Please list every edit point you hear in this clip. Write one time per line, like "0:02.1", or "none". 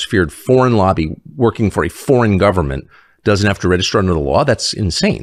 none